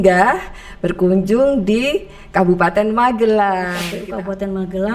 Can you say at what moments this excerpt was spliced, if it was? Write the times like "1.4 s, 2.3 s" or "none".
3.9 s